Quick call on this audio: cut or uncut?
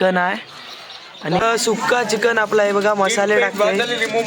cut